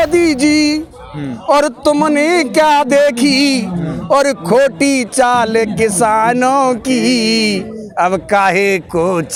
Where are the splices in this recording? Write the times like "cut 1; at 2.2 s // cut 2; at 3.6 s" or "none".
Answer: none